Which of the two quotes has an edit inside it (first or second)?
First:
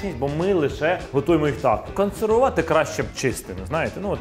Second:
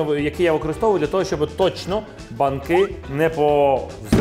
first